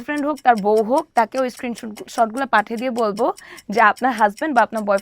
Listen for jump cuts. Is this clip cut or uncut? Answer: uncut